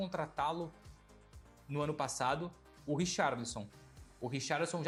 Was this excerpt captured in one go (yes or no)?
yes